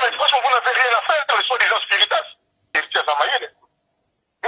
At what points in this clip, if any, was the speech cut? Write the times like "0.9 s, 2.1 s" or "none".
2.8 s